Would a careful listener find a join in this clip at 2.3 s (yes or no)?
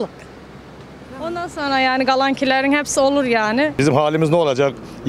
no